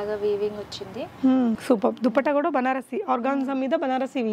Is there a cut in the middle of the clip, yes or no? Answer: yes